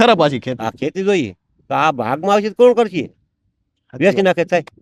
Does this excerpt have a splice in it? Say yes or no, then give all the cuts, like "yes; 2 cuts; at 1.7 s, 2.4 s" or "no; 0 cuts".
no; 0 cuts